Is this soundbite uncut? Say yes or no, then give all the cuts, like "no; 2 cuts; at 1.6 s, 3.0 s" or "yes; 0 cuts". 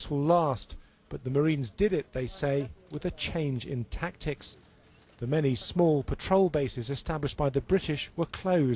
yes; 0 cuts